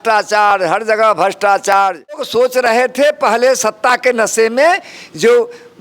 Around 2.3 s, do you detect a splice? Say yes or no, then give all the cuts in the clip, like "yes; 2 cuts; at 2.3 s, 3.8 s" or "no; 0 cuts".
yes; 1 cut; at 2.3 s